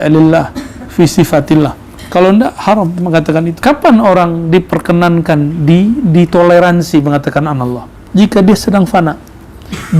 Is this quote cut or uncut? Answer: cut